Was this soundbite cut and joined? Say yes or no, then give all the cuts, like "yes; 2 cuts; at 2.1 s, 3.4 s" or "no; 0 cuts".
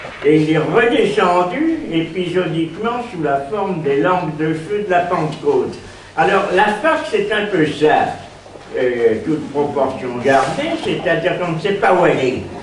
no; 0 cuts